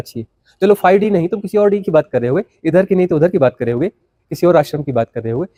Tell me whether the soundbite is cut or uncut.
uncut